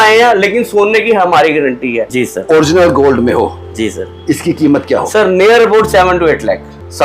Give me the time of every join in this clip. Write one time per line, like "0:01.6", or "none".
0:02.0